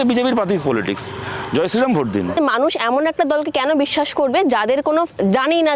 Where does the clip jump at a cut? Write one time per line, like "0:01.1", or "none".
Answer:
0:02.4

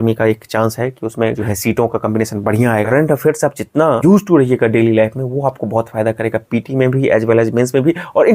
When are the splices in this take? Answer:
0:01.5
0:02.9
0:04.0

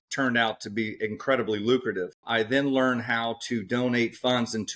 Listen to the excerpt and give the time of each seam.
0:02.2

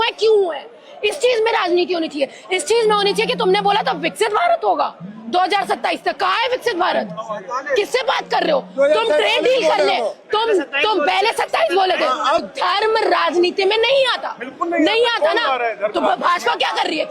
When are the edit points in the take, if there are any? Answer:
0:12.4

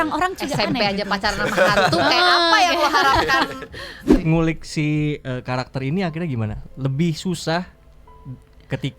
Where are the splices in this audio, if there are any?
0:04.2

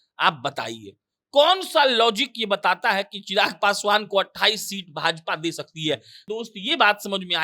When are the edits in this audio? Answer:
0:06.1

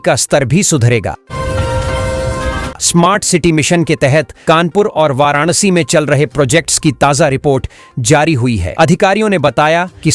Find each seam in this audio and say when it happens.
0:01.2
0:02.7

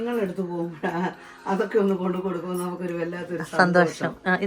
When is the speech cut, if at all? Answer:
none

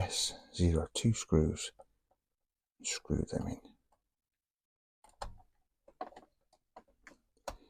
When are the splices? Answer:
none

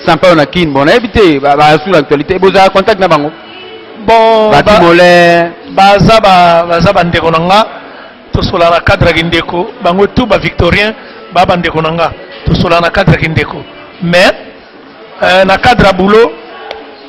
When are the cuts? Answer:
none

